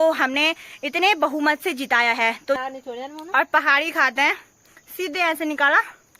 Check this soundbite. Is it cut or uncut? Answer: cut